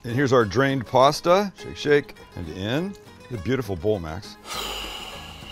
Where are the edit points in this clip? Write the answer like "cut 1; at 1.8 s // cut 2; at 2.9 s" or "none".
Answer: cut 1; at 4.3 s